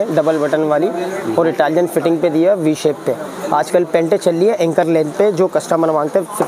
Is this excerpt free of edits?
yes; 0 cuts

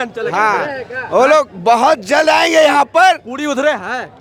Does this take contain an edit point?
no; 0 cuts

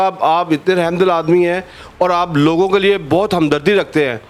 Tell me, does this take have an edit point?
no; 0 cuts

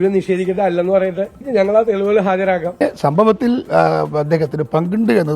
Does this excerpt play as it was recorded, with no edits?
no; 1 cut; at 2.8 s

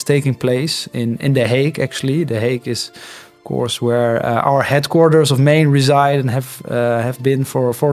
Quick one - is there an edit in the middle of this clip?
no; 0 cuts

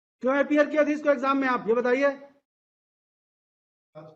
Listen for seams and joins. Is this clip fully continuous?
yes; 0 cuts

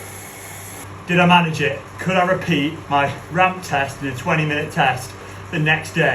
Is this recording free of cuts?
no; 2 cuts; at 0.8 s, 2.8 s

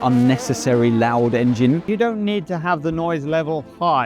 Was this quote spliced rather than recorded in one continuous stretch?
yes; 1 cut; at 1.8 s

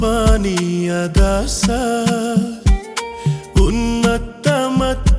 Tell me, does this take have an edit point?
no; 0 cuts

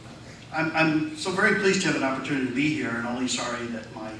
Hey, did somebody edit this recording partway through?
no; 0 cuts

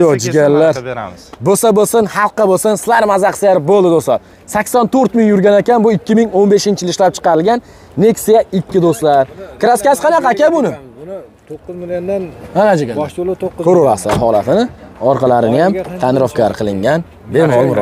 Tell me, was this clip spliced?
no; 0 cuts

